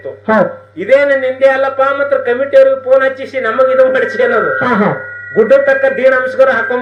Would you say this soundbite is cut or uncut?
uncut